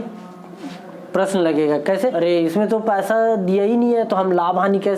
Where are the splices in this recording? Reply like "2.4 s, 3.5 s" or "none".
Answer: 2.1 s